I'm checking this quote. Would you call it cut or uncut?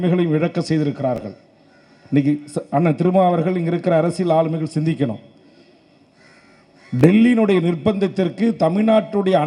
uncut